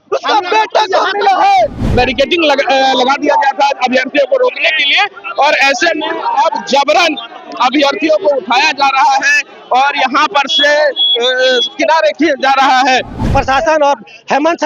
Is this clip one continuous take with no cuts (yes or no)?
no